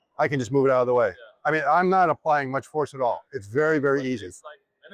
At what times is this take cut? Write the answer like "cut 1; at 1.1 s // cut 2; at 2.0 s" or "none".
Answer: none